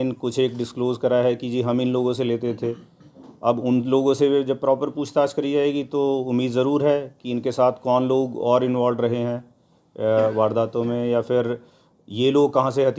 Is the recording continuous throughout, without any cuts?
yes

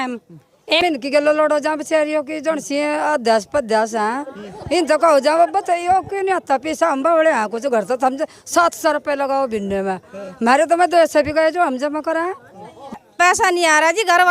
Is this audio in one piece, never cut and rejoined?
no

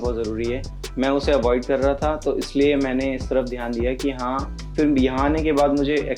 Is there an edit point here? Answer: yes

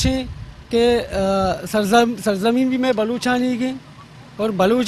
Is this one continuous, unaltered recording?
yes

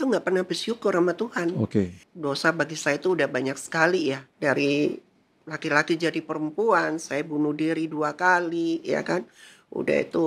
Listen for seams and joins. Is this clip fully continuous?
no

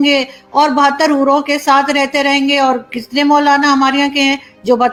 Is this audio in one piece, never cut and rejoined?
yes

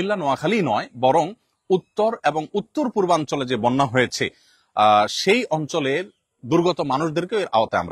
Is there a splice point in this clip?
no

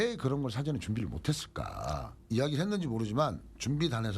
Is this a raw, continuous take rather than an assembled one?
no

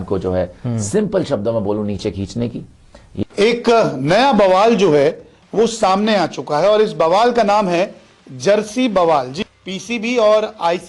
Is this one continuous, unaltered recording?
no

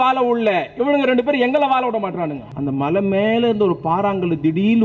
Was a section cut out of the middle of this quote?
yes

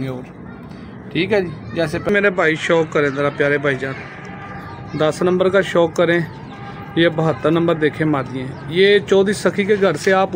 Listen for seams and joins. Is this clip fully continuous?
no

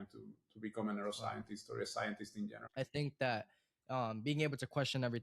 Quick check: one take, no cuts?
no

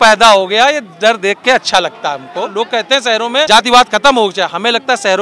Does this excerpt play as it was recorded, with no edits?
no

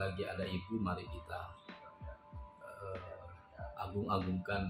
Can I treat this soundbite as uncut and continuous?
yes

